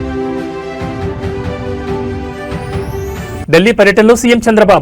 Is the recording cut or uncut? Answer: uncut